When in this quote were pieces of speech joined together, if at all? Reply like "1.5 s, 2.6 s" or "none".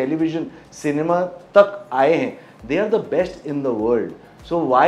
none